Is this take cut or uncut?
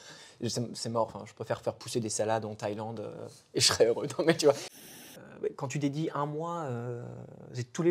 cut